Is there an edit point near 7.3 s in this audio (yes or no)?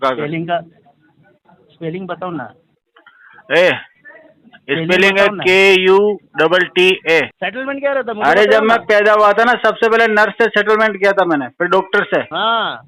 yes